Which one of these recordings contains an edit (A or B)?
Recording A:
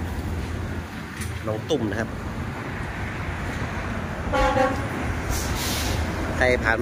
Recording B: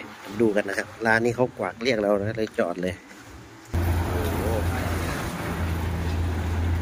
B